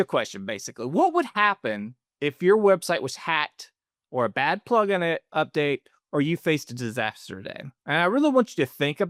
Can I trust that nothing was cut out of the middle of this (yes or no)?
yes